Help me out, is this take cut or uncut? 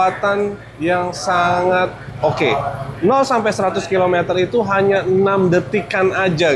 uncut